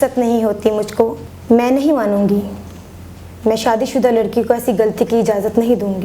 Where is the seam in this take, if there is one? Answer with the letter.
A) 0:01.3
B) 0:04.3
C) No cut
A